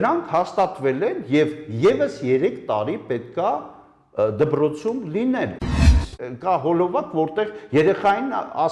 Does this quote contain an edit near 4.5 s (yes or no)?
no